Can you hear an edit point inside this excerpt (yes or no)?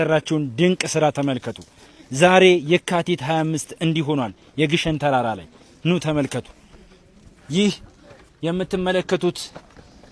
no